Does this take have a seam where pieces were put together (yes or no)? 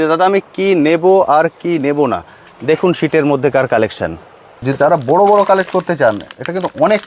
yes